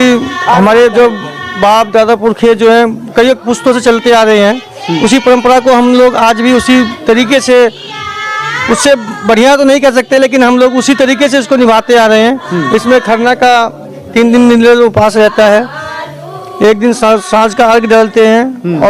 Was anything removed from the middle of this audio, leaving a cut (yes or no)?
no